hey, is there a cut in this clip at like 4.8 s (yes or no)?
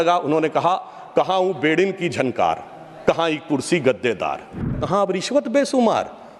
yes